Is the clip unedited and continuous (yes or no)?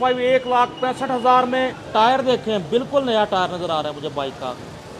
no